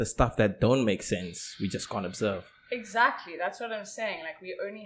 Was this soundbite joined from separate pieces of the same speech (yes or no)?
no